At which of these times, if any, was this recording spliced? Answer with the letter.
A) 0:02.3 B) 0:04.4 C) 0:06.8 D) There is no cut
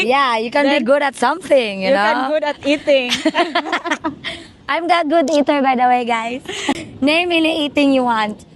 C